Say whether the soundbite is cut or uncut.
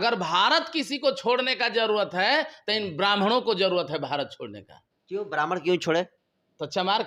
uncut